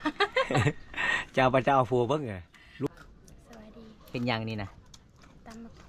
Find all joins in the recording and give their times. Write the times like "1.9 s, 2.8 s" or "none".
2.9 s